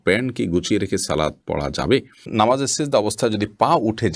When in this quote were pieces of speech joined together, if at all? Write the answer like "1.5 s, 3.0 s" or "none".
2.3 s